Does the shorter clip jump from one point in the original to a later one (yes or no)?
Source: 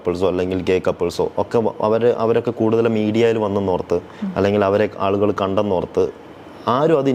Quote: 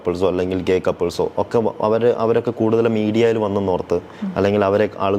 no